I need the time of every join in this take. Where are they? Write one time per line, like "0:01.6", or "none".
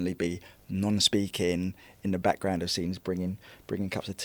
none